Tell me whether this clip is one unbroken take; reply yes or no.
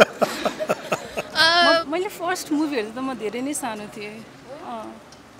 no